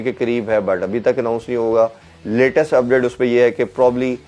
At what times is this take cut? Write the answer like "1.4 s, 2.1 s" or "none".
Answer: none